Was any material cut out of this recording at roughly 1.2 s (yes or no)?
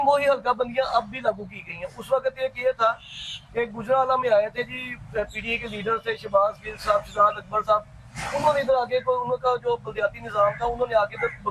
no